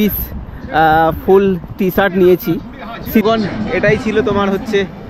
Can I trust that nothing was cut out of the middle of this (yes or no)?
no